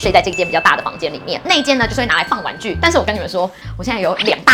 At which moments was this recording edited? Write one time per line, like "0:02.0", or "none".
0:02.7